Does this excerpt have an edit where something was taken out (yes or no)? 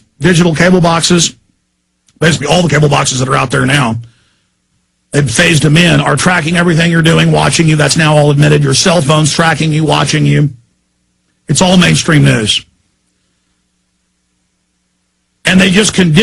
yes